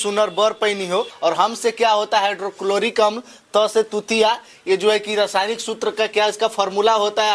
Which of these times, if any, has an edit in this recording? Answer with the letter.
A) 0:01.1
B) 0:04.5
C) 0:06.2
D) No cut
A